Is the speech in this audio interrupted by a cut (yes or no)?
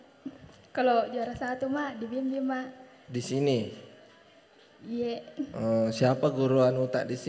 no